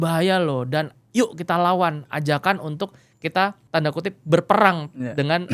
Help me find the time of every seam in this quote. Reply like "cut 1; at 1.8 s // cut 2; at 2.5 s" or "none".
cut 1; at 3.6 s